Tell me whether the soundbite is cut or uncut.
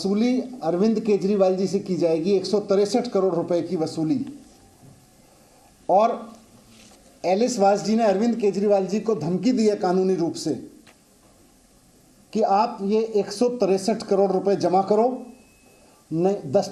uncut